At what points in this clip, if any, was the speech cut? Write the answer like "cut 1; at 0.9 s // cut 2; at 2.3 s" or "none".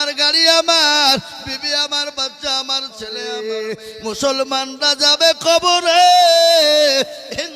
cut 1; at 3.3 s

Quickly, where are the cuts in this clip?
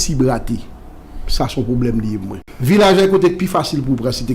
cut 1; at 2.4 s

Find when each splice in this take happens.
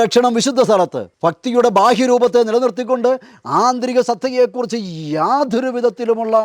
cut 1; at 1.0 s

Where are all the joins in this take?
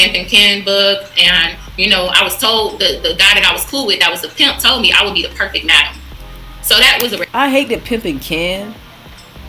cut 1; at 7.2 s

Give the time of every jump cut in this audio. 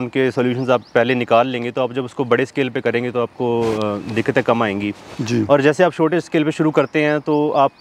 none

